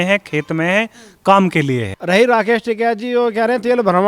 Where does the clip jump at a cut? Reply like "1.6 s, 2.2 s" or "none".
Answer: 1.9 s